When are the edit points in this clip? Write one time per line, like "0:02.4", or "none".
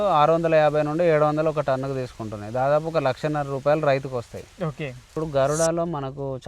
0:05.1